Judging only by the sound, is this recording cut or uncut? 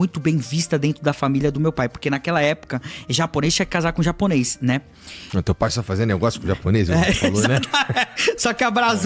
uncut